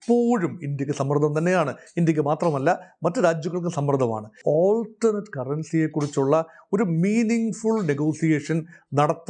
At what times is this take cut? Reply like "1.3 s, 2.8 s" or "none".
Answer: 4.4 s